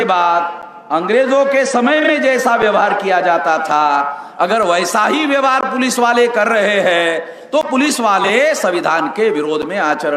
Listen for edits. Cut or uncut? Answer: uncut